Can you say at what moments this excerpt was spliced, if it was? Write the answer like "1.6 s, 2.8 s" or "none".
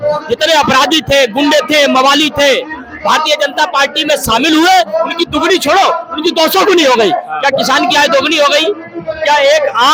none